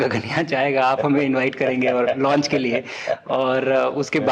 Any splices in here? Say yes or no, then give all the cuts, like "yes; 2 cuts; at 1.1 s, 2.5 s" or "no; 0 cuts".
no; 0 cuts